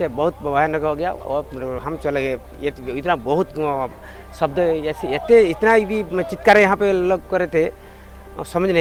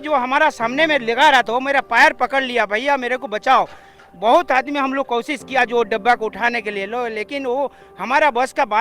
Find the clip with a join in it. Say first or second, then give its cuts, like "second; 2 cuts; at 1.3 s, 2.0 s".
second; 1 cut; at 4.1 s